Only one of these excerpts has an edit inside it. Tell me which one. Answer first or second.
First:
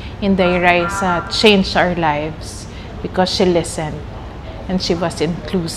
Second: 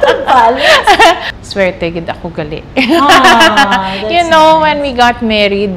second